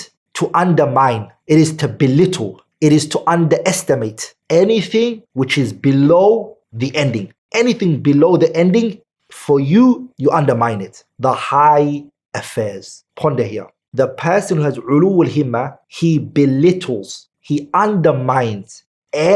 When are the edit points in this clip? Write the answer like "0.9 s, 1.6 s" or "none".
4.3 s, 11.0 s, 13.8 s